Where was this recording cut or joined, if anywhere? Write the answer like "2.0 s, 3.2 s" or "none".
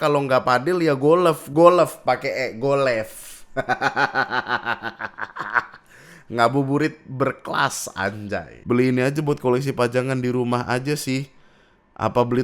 8.5 s